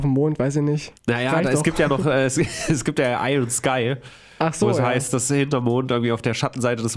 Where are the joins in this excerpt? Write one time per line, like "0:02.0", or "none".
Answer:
0:00.9

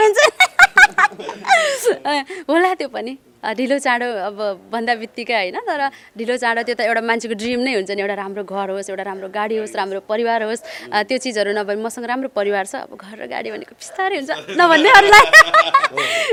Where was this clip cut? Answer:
none

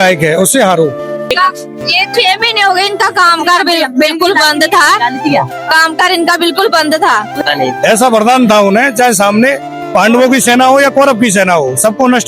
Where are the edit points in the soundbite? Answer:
0:01.1
0:07.3

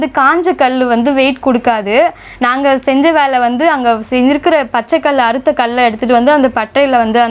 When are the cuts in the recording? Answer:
none

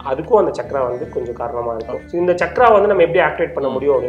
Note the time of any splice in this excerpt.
0:02.0

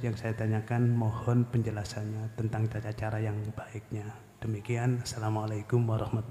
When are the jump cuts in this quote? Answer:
none

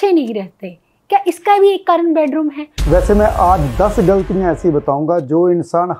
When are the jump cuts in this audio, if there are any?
0:02.7

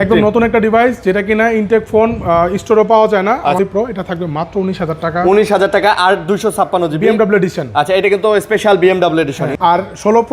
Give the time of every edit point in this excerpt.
0:03.6
0:09.4

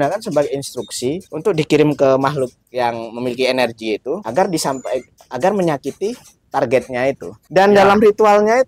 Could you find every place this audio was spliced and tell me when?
0:01.3
0:04.2
0:07.3

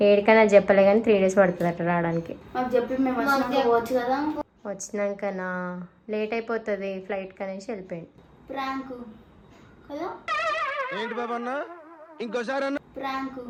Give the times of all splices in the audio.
none

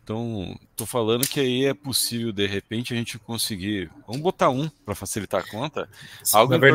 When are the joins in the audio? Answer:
none

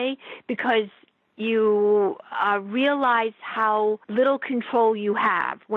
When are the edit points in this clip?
0:04.0

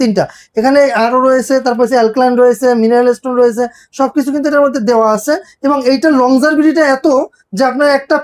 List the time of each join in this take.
none

